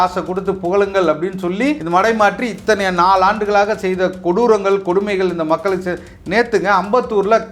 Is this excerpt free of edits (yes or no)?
no